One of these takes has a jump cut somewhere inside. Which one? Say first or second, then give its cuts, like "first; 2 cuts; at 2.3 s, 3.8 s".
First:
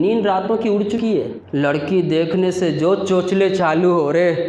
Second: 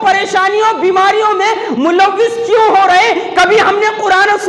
first; 1 cut; at 1.4 s